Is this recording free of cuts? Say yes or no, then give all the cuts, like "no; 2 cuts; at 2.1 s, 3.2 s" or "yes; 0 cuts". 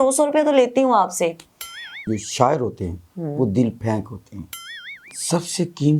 no; 2 cuts; at 1.9 s, 5.1 s